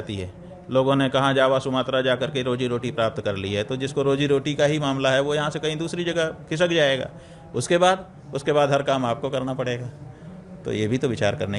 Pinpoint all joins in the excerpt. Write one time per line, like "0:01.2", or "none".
none

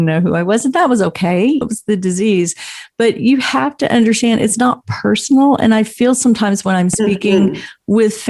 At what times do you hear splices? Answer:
0:01.6

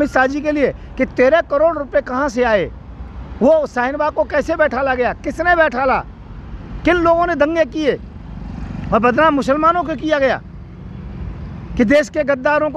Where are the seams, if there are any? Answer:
none

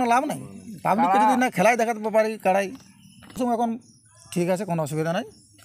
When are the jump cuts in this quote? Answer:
0:03.4

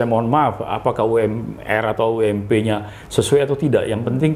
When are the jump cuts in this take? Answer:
none

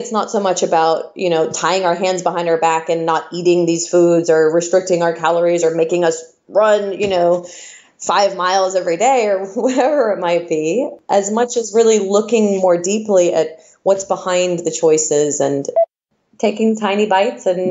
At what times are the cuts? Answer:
0:11.0
0:15.8

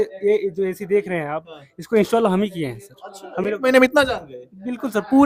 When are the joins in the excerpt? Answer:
none

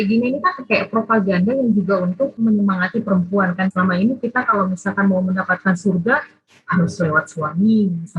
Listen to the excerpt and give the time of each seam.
0:03.7

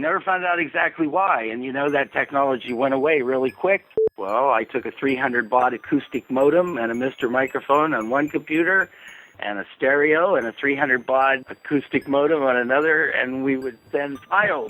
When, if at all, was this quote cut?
0:04.0
0:11.5

